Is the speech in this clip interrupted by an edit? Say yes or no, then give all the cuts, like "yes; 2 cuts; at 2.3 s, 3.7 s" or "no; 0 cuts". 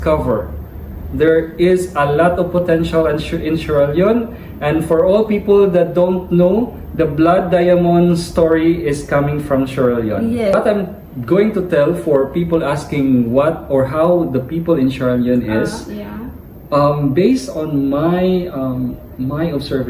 yes; 1 cut; at 10.5 s